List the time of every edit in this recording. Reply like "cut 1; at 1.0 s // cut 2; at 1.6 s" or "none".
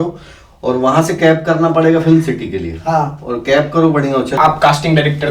cut 1; at 4.3 s